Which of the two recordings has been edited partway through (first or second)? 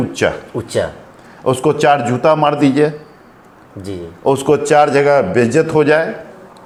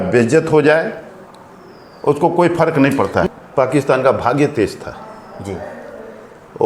second